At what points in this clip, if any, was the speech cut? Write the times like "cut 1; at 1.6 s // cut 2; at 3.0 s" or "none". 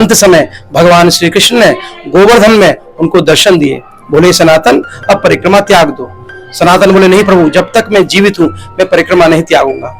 none